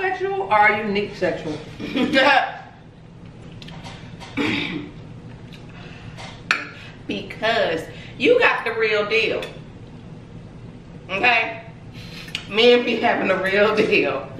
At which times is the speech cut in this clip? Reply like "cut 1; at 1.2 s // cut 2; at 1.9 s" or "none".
cut 1; at 6.5 s